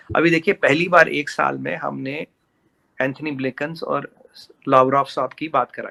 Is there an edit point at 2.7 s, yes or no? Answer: no